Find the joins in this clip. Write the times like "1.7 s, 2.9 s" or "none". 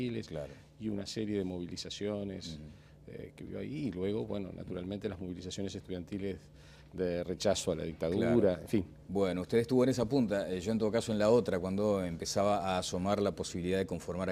none